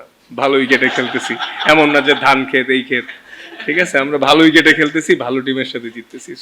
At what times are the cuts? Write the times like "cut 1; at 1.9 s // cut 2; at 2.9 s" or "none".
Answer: none

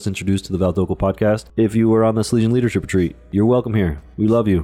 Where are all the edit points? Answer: cut 1; at 1.5 s

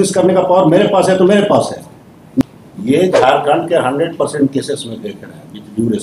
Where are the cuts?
cut 1; at 2.4 s

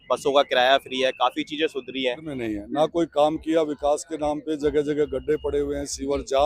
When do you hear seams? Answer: cut 1; at 2.3 s

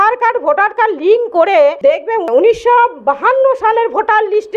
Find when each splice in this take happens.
cut 1; at 1.8 s

